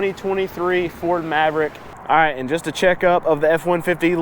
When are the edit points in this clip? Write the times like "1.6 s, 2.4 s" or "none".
1.9 s

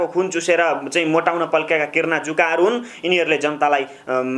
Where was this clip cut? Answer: none

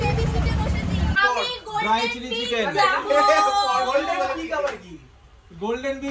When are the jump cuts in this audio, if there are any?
1.2 s

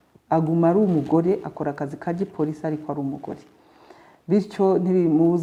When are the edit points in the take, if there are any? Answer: none

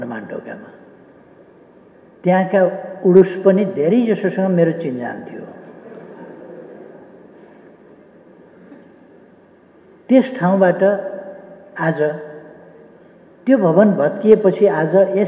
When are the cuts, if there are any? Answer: none

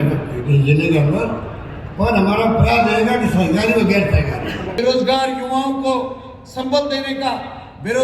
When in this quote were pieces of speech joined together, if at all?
4.7 s

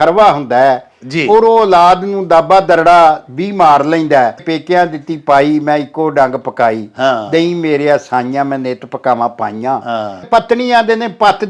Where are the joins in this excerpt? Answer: 4.4 s, 10.2 s

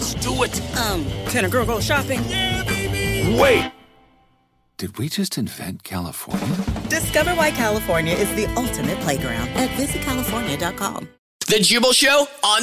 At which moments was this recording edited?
11.4 s

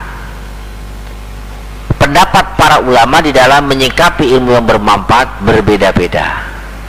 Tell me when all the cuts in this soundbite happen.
none

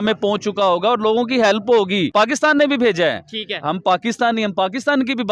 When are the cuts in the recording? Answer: 2.1 s

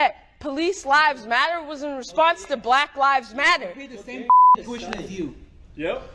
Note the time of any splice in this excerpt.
none

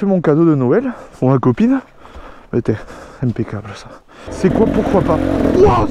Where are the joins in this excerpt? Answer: 4.3 s

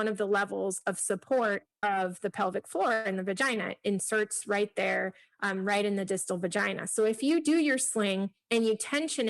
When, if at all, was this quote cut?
1.7 s, 8.4 s

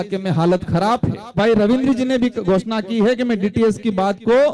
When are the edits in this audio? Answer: 1.3 s

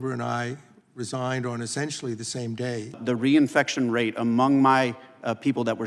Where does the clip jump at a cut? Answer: 3.0 s

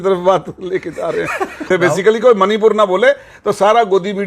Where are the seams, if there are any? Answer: 1.6 s

